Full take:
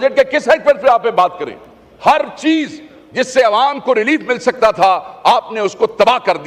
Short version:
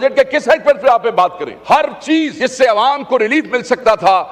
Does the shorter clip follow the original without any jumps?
no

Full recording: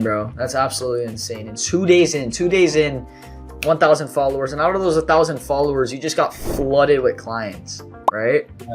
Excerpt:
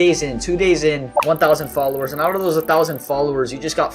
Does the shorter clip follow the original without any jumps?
no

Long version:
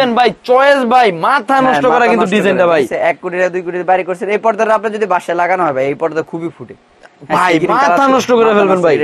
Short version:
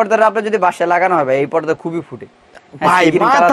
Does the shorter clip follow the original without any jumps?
yes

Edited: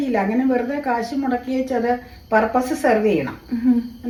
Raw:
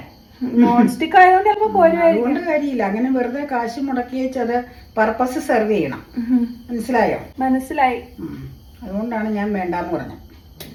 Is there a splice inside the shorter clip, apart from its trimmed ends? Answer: no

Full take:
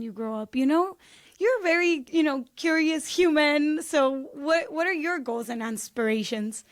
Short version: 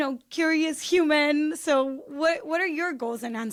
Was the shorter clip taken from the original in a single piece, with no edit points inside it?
yes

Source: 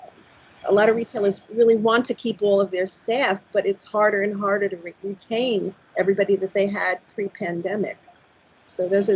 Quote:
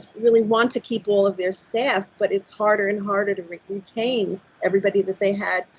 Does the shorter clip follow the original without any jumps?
yes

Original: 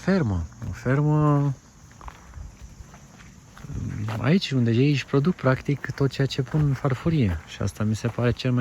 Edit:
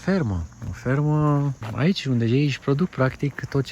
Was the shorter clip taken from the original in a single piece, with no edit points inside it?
no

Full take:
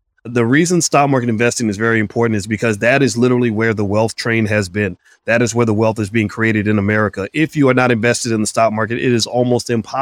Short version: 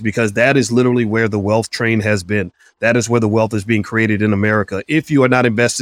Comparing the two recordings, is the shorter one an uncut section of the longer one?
yes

